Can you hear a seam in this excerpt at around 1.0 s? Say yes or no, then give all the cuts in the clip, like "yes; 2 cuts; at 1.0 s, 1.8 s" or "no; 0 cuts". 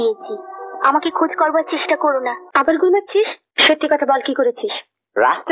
no; 2 cuts; at 2.4 s, 3.5 s